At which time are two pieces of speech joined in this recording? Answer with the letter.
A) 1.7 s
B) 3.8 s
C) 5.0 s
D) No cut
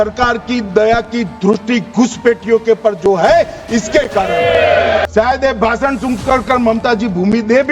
C